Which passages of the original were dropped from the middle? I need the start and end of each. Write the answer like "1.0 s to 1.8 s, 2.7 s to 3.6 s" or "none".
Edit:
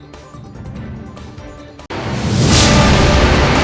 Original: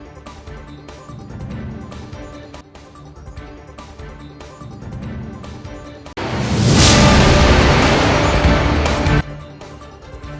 2.2 s to 5.7 s